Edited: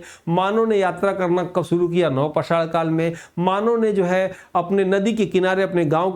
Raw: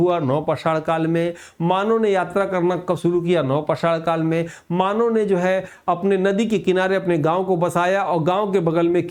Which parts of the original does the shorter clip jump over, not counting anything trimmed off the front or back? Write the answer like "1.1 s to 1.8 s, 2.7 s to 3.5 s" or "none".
none